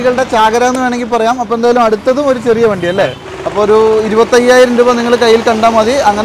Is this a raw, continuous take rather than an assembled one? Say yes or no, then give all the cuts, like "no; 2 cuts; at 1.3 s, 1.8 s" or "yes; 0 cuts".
no; 1 cut; at 3.2 s